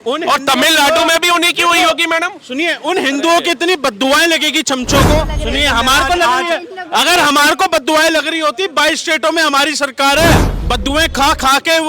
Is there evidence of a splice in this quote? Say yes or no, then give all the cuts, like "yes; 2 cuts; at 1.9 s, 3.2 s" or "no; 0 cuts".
yes; 2 cuts; at 5.3 s, 10.5 s